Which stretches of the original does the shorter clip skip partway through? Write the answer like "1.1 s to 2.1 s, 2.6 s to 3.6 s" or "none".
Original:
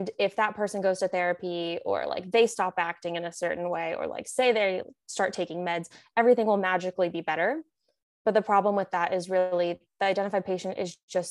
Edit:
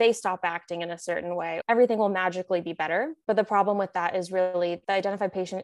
3.9 s to 6.1 s, 7.6 s to 8.1 s, 9.8 s to 9.9 s